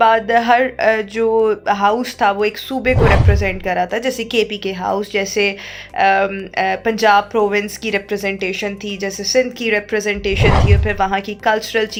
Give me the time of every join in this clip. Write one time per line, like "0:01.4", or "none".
none